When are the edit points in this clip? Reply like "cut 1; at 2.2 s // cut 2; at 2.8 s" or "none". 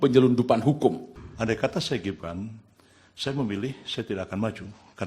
cut 1; at 1.2 s